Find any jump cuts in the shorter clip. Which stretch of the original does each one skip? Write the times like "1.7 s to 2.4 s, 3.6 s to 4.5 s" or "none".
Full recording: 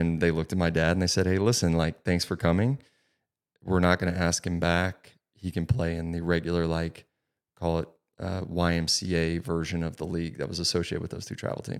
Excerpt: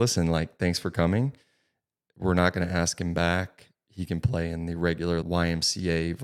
6.7 s to 8.5 s